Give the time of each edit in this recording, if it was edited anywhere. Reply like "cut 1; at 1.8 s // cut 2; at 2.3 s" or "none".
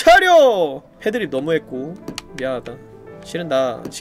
cut 1; at 3.1 s